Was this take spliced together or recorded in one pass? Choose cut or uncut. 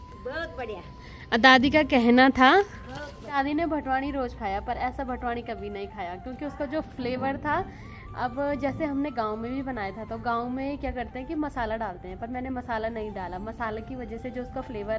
uncut